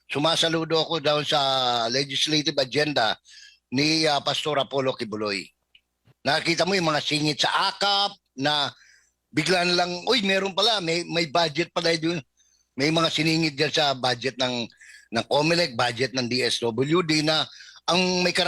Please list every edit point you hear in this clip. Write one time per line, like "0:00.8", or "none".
0:06.1